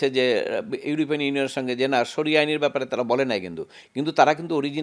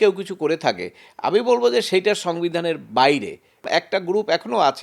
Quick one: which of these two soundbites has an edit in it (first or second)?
second